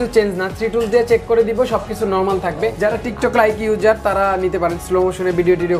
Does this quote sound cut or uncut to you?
cut